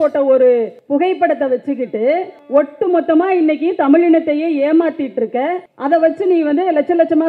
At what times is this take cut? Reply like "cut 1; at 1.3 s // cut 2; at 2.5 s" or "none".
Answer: none